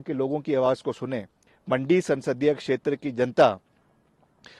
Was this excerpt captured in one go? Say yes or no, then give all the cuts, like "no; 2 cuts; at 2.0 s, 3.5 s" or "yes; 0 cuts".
no; 1 cut; at 1.4 s